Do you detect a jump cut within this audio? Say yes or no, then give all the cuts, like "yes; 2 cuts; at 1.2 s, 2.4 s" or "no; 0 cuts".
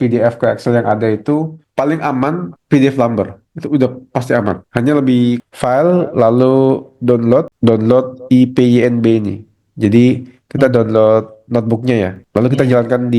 yes; 2 cuts; at 1.6 s, 5.4 s